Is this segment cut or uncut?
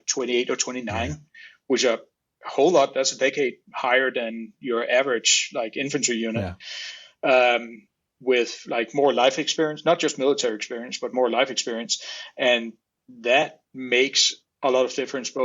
uncut